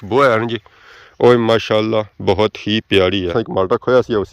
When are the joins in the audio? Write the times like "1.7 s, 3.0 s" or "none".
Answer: 3.3 s